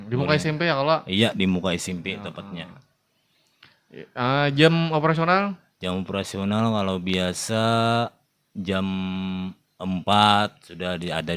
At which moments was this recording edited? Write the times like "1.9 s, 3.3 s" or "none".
none